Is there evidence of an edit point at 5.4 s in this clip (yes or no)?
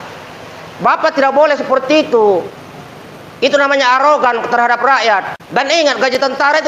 yes